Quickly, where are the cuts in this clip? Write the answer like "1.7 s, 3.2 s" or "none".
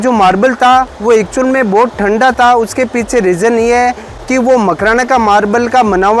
none